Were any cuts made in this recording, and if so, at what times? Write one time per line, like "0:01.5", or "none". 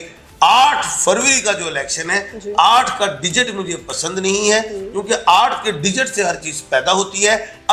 none